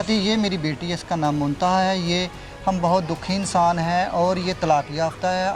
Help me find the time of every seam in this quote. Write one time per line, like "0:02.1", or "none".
none